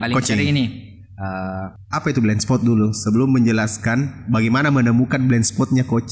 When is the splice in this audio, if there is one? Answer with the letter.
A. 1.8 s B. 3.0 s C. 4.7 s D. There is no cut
A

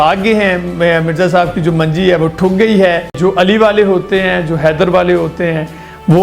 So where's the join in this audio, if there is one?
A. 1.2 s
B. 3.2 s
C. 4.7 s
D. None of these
B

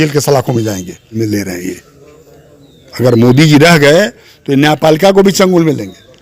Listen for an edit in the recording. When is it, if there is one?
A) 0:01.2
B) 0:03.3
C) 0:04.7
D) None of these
A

